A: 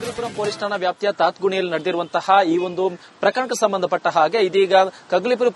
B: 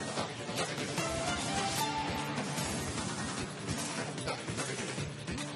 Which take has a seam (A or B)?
B